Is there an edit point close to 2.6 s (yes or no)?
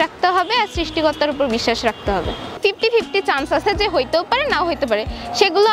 yes